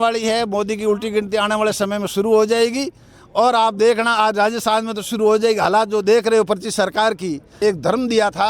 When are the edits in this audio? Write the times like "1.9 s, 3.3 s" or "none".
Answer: 7.4 s